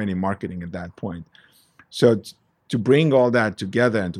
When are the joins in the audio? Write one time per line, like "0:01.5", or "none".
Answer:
none